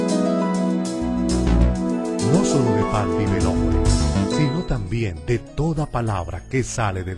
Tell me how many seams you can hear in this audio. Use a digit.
0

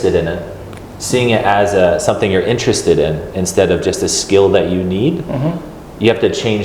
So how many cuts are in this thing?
0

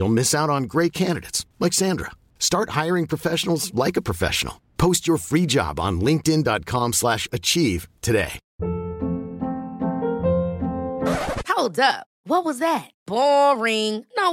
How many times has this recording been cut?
1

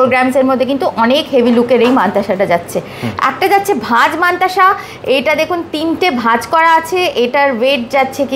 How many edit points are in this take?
0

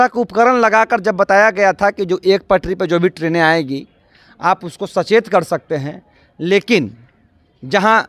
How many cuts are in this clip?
0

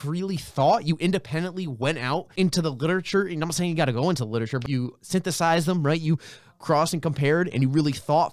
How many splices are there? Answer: 2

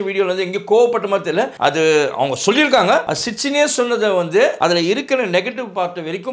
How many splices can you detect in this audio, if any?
3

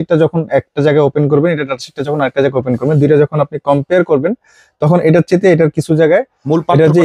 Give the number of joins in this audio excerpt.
0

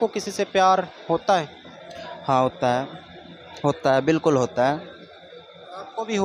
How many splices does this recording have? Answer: 0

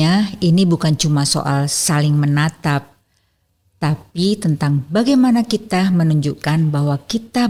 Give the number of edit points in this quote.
0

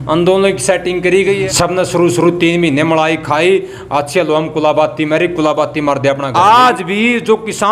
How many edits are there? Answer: 2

